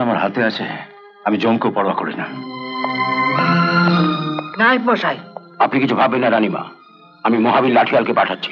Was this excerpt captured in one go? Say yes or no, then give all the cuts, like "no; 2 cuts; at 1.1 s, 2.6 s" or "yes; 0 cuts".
yes; 0 cuts